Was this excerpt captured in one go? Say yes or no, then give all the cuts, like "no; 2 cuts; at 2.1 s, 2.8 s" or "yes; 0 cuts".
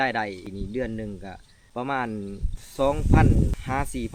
yes; 0 cuts